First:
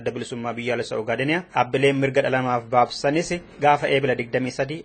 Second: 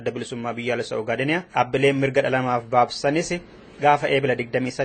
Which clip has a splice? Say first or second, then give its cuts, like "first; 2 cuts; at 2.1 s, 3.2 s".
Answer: first; 1 cut; at 3.4 s